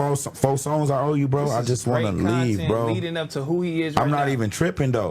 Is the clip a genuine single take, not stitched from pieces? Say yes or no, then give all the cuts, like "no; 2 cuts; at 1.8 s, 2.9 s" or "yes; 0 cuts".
yes; 0 cuts